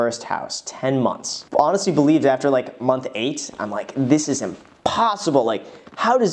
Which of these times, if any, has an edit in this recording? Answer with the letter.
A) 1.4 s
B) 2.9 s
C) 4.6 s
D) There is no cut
A